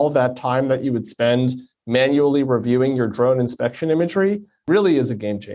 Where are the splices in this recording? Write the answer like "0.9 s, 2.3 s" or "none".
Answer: 4.7 s